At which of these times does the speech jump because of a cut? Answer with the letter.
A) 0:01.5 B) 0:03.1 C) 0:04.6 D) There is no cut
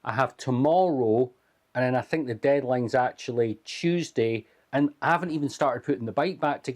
C